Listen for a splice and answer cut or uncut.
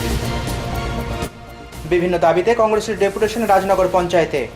cut